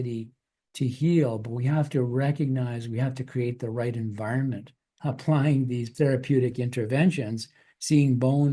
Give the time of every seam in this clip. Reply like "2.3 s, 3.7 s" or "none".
4.9 s, 5.9 s